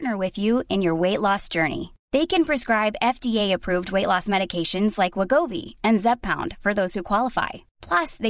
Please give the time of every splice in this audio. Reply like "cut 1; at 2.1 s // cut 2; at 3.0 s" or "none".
none